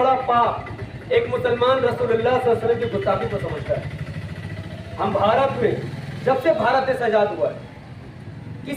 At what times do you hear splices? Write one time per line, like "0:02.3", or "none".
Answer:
none